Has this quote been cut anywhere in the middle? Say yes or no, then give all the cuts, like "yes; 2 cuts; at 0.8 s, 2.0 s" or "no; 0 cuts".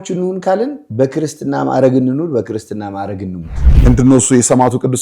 yes; 1 cut; at 3.7 s